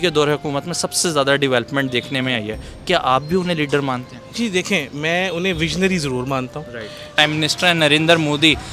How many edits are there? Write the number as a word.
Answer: one